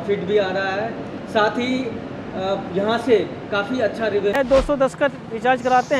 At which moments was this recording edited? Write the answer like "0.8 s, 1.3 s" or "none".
4.4 s